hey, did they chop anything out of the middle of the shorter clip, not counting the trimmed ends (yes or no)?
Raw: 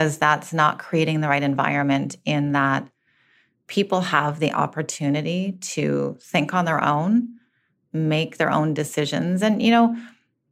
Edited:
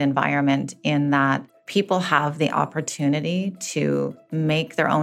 yes